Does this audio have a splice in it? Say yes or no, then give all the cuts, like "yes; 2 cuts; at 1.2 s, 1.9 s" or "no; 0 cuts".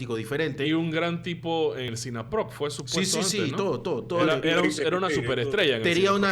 yes; 1 cut; at 1.9 s